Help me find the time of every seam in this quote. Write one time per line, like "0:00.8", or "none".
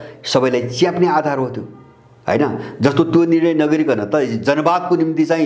none